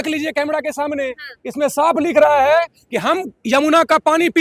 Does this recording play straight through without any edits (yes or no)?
yes